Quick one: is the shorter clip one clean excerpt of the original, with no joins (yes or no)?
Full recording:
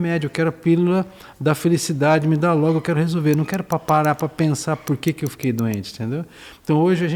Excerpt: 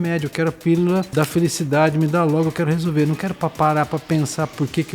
no